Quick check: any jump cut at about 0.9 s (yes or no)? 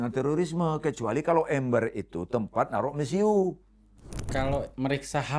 no